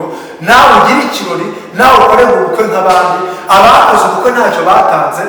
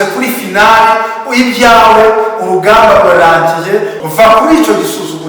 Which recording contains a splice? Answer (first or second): second